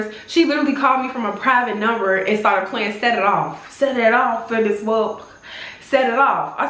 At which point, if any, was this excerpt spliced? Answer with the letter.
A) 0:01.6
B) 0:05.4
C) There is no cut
C